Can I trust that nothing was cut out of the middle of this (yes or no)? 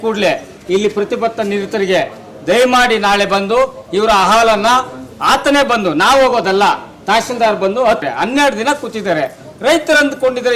no